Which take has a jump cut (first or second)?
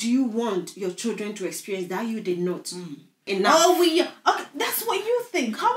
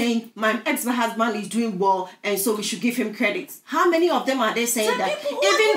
first